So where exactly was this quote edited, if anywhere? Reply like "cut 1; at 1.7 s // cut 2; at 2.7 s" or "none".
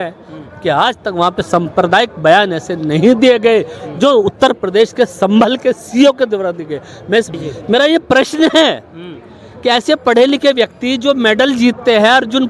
cut 1; at 7.3 s